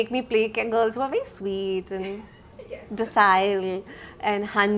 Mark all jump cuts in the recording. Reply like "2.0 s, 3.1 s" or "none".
none